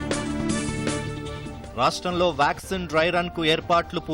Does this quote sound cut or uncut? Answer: cut